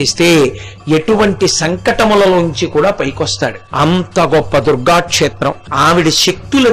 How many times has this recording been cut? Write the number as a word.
two